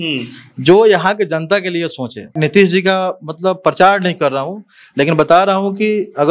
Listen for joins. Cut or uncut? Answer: cut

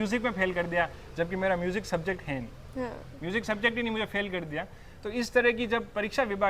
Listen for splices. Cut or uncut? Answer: uncut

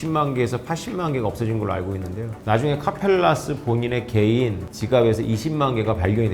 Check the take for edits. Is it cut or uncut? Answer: uncut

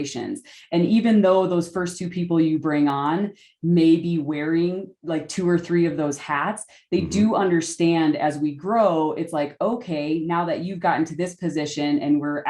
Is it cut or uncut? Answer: uncut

